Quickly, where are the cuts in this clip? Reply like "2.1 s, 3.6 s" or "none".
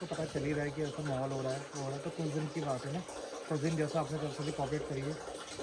none